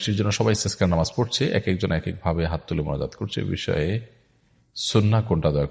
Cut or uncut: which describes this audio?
uncut